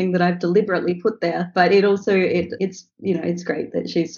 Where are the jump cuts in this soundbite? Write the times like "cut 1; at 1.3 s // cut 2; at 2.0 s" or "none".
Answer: cut 1; at 1.4 s // cut 2; at 2.5 s